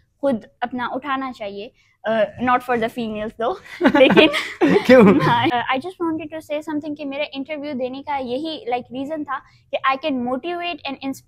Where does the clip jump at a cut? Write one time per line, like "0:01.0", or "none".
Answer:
0:05.5